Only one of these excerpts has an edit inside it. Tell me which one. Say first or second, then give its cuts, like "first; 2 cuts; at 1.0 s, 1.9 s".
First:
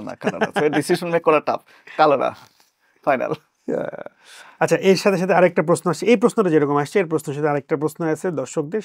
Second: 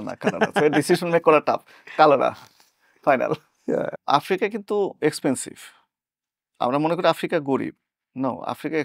second; 1 cut; at 4.0 s